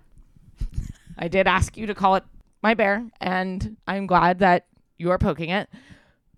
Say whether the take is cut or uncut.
uncut